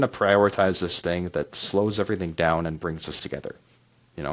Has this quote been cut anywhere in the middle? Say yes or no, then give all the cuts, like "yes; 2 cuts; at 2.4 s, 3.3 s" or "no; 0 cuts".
no; 0 cuts